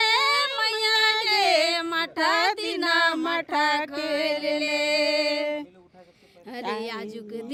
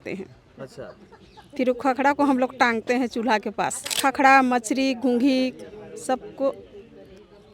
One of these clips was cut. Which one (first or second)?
second